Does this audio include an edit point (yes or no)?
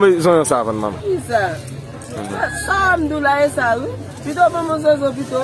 yes